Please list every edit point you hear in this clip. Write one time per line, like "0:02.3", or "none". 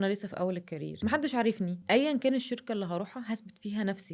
0:01.0
0:01.8